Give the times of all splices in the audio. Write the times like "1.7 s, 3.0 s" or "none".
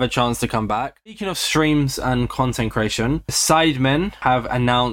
1.1 s